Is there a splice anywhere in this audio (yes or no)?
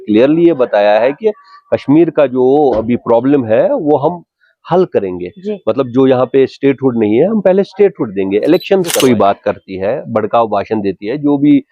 yes